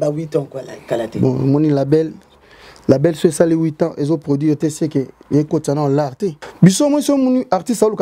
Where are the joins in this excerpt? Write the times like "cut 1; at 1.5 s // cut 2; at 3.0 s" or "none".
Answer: cut 1; at 6.4 s